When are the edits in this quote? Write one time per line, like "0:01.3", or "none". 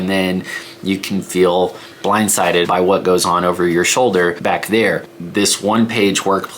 0:02.7
0:04.4
0:05.3

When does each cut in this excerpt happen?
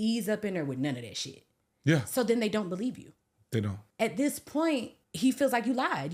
0:03.8
0:05.0

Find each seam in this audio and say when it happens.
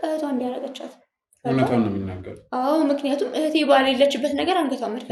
none

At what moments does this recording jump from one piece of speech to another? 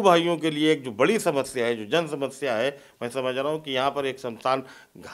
none

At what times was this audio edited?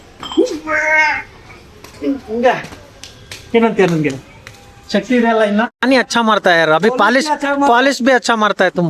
0:05.7

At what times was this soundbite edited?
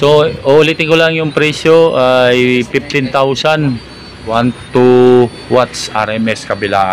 0:04.3

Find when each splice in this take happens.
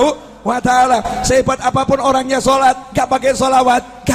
none

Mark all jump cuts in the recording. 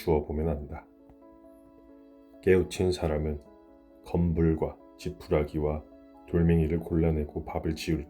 0:00.8
0:02.4

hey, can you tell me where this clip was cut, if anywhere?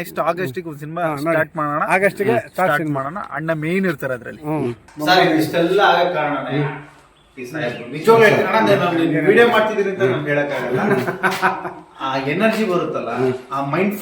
0:04.8

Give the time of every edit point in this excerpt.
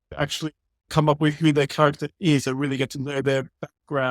0:00.9

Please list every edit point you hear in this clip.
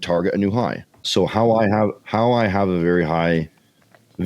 0:01.0

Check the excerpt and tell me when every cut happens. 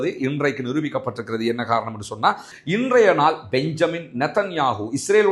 0:02.5

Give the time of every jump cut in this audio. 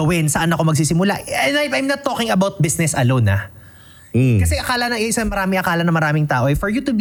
none

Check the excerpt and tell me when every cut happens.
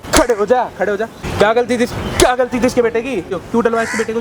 0:01.2
0:03.4

